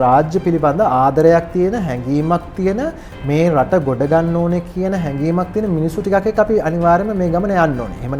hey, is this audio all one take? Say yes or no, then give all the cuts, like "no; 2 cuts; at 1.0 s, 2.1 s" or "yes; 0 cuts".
yes; 0 cuts